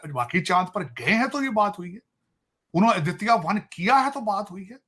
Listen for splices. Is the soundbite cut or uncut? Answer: uncut